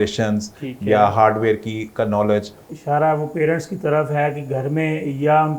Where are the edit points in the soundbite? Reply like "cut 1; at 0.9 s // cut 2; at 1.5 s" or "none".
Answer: cut 1; at 2.7 s